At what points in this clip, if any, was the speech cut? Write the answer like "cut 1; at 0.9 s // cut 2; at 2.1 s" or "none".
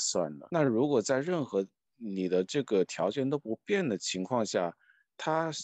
none